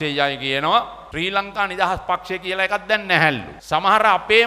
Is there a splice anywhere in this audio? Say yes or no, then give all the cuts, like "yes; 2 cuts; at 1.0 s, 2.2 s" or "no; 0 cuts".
yes; 2 cuts; at 1.0 s, 3.5 s